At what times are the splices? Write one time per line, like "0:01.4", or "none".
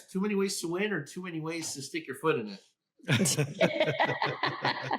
none